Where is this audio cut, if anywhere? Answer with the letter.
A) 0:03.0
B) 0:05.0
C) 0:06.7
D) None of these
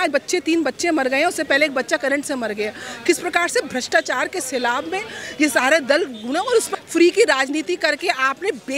C